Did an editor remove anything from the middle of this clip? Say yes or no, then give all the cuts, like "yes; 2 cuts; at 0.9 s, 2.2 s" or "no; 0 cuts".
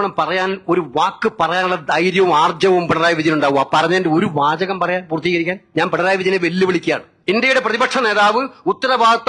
yes; 2 cuts; at 5.6 s, 7.1 s